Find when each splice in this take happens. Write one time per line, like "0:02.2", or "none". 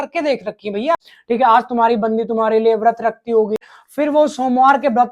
0:01.0
0:03.8